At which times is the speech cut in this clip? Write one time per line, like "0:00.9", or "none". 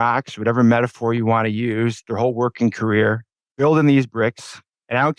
none